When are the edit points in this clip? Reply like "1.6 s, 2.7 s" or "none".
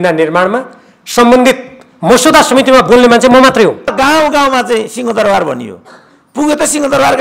3.9 s